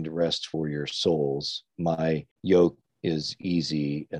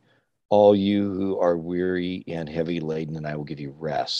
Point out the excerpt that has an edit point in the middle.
first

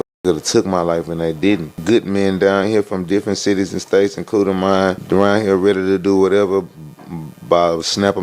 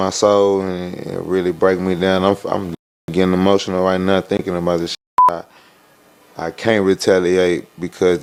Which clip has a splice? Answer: first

